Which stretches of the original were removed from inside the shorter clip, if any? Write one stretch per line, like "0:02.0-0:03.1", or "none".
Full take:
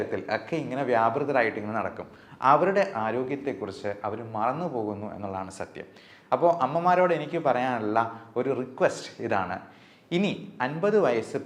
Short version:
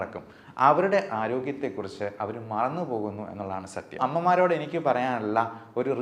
0:05.8-0:06.6